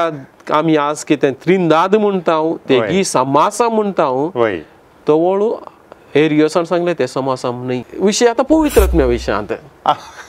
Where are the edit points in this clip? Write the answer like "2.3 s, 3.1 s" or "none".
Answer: 7.9 s